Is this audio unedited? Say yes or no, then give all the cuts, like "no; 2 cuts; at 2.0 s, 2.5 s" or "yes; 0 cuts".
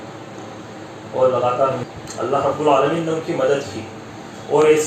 no; 1 cut; at 1.9 s